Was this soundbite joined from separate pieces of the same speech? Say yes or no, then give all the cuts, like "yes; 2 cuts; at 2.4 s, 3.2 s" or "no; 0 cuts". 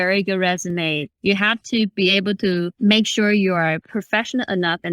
yes; 3 cuts; at 1.1 s, 2.7 s, 3.8 s